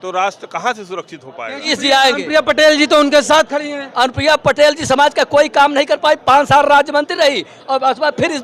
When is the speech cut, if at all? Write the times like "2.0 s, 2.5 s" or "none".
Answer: 1.7 s